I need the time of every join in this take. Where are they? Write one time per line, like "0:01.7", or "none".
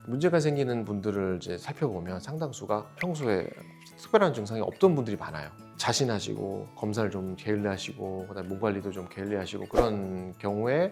none